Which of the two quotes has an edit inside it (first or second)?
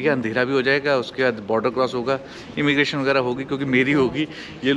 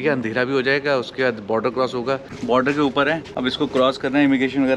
second